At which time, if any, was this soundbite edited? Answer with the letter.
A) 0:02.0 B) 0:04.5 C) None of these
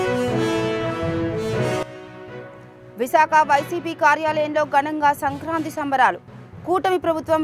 A